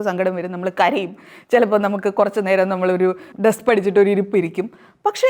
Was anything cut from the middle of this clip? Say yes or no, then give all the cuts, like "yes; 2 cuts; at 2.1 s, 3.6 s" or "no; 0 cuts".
yes; 1 cut; at 3.3 s